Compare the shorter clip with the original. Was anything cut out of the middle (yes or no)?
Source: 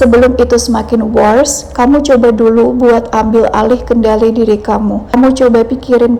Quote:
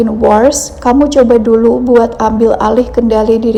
no